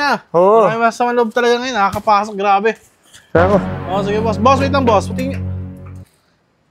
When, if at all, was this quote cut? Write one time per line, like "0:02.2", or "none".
none